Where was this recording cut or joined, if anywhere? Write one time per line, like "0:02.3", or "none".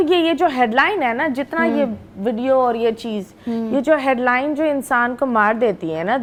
none